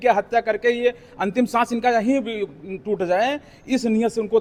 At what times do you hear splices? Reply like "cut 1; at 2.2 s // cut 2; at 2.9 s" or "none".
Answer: none